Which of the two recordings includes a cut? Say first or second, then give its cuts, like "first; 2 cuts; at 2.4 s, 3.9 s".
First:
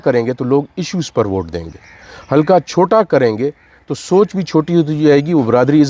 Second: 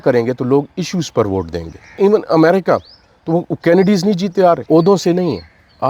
second; 2 cuts; at 2.0 s, 4.6 s